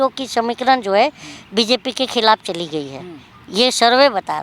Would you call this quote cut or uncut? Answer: uncut